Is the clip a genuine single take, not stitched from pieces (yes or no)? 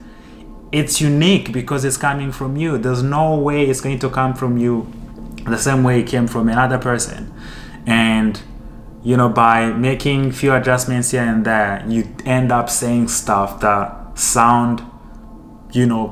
yes